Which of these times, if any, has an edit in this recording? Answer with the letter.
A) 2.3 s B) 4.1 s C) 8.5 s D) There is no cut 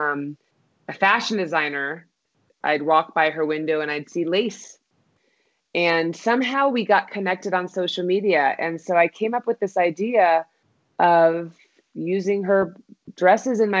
A